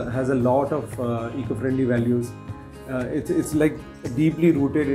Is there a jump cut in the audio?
no; 0 cuts

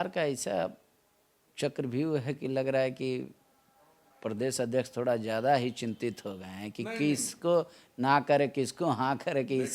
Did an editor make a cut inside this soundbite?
no; 0 cuts

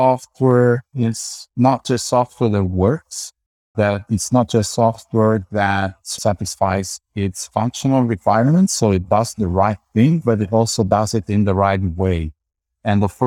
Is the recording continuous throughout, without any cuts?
yes; 0 cuts

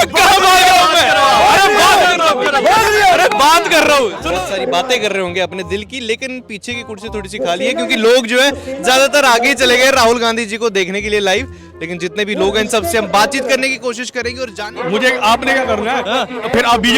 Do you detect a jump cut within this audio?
yes; 2 cuts; at 4.2 s, 14.5 s

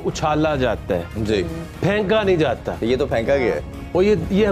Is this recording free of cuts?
yes; 0 cuts

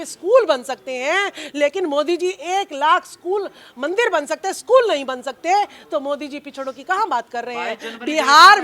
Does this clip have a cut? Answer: no; 0 cuts

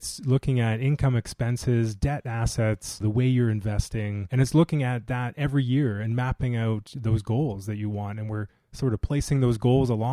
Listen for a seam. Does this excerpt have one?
yes; 2 cuts; at 3.0 s, 4.2 s

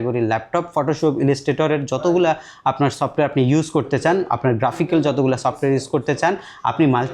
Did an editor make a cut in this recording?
no; 0 cuts

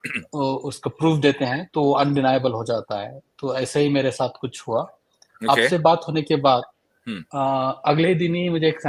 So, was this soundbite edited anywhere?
no; 0 cuts

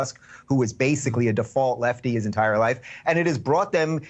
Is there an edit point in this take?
no; 0 cuts

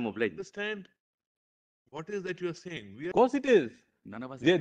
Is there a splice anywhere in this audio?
yes; 1 cut; at 3.1 s

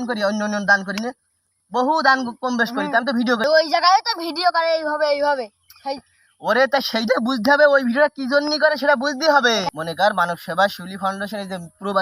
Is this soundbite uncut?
no; 2 cuts; at 3.4 s, 9.8 s

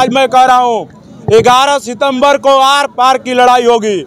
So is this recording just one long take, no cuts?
yes; 0 cuts

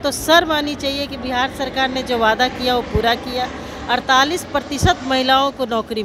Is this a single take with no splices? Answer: yes; 0 cuts

